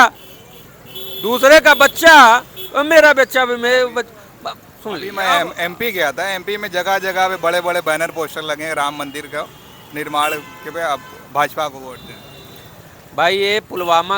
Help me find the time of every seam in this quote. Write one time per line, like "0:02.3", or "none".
none